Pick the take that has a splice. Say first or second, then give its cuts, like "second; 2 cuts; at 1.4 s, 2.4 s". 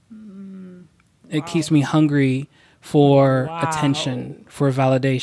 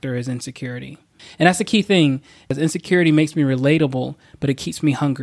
second; 2 cuts; at 1.2 s, 2.5 s